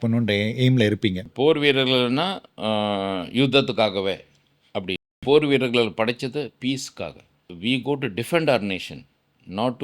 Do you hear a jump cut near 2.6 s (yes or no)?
no